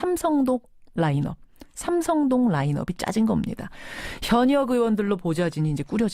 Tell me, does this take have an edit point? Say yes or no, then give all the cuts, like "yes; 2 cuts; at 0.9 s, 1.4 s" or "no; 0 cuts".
yes; 1 cut; at 2.4 s